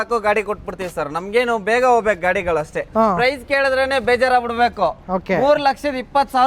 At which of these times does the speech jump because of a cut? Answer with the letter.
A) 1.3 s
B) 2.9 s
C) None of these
B